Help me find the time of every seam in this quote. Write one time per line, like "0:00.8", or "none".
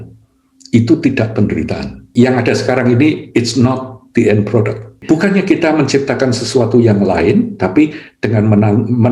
0:04.9

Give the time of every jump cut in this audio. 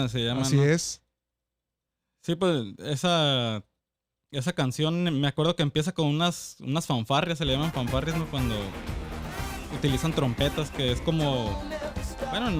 none

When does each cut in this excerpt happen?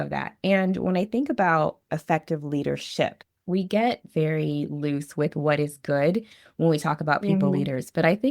0:01.9
0:03.2

